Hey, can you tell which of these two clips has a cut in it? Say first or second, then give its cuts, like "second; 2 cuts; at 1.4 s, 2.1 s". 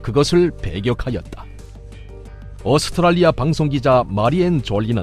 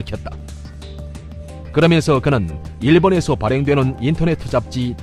first; 1 cut; at 1.4 s